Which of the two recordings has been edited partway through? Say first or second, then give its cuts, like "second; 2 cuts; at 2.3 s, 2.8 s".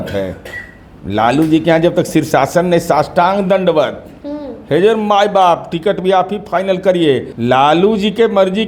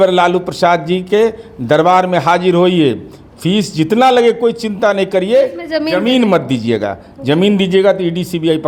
first; 1 cut; at 7.3 s